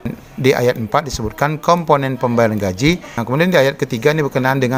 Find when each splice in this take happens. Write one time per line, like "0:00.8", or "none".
0:03.1